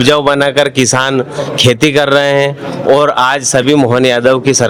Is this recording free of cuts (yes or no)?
yes